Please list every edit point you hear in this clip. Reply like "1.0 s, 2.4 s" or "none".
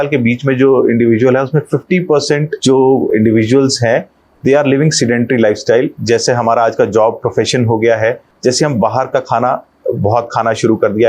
3.1 s, 6.0 s, 8.3 s